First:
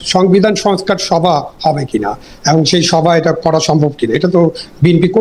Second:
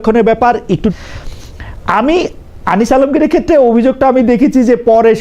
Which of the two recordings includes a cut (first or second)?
second